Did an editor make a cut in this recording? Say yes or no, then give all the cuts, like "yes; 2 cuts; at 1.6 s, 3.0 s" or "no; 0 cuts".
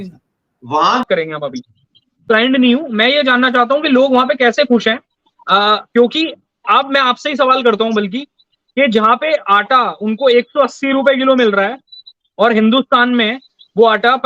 yes; 1 cut; at 1.0 s